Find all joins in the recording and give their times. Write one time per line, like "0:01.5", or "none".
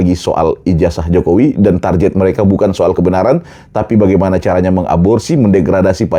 none